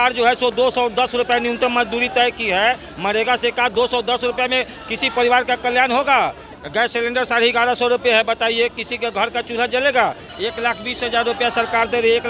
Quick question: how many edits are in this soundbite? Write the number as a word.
two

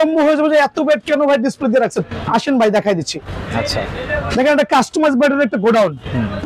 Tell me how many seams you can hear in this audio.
zero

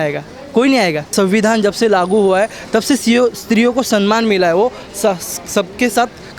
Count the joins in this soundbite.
one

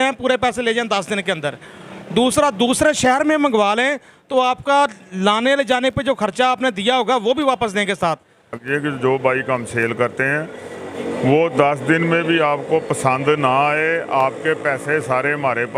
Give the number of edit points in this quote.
one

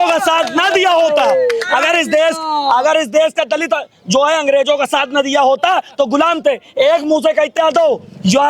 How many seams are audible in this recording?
one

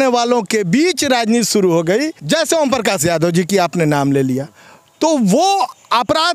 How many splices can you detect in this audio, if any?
one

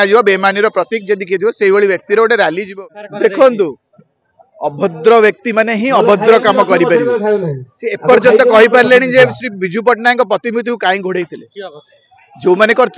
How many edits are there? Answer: one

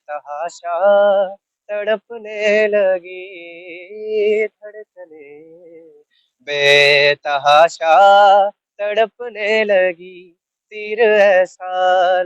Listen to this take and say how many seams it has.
zero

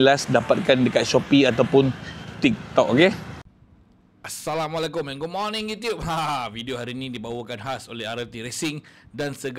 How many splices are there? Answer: one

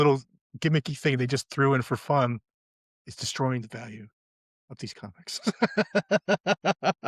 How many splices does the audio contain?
zero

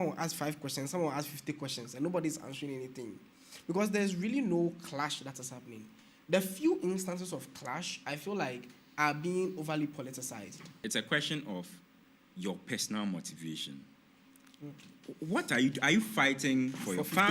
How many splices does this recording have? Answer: one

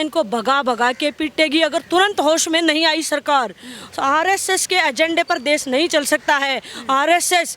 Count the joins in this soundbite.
zero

